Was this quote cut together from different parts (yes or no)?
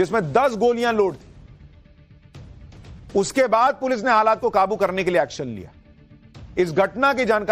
no